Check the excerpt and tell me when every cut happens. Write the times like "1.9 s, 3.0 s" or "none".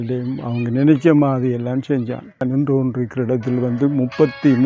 2.5 s